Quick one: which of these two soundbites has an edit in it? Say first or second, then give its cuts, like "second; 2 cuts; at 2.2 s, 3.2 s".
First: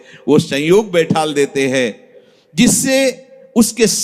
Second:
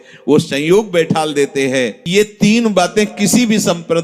second; 1 cut; at 2.0 s